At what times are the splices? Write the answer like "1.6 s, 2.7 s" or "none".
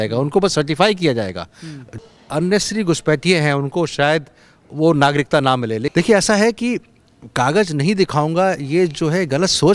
2.0 s, 5.3 s